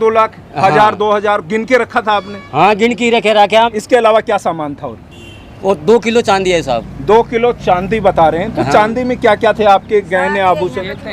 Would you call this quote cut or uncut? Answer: cut